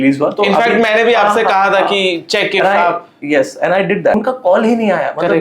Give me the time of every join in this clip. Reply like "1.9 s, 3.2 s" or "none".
4.1 s